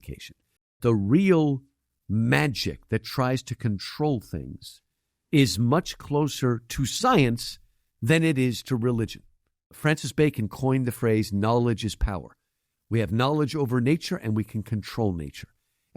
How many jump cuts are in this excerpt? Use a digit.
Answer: 2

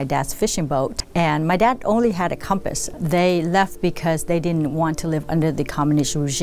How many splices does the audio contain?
2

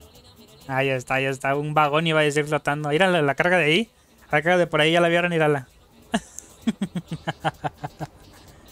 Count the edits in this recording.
0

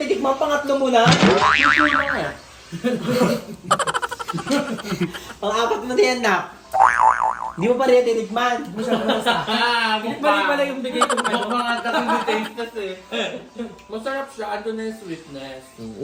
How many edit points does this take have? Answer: 0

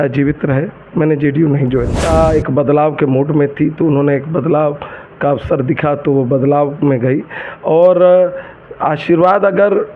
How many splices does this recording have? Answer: 1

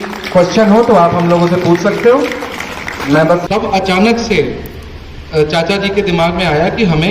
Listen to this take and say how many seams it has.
1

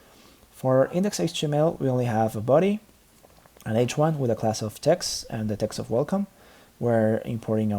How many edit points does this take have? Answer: 1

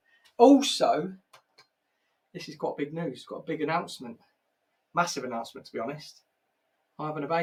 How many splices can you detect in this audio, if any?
0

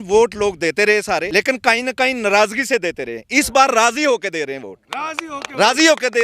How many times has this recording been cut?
1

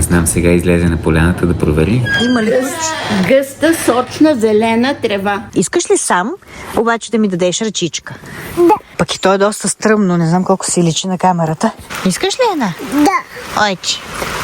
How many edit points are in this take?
3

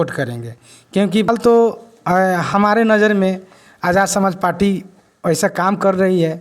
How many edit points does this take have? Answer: 1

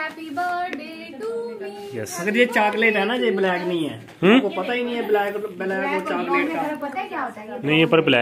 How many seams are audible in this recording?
0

